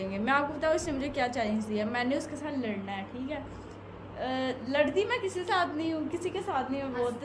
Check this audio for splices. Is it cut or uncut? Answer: uncut